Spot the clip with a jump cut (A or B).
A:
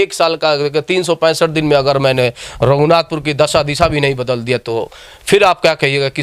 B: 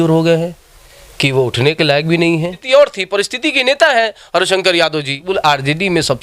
B